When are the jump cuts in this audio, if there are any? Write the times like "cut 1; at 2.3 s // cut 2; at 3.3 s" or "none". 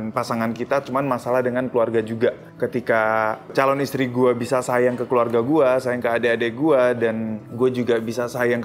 cut 1; at 2.5 s